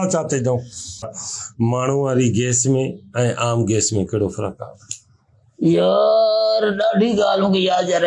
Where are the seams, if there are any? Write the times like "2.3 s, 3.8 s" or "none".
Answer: 1.0 s